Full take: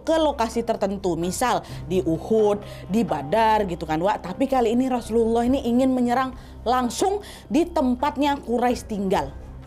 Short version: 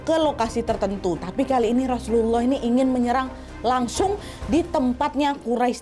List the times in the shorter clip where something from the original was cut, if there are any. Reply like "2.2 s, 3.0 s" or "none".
1.2 s